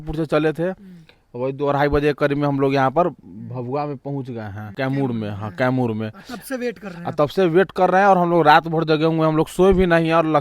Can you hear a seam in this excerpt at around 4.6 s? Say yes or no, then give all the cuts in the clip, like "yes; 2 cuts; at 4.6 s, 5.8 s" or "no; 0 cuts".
yes; 1 cut; at 4.6 s